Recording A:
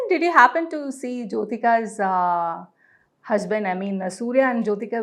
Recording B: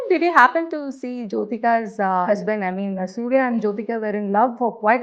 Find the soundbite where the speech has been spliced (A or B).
B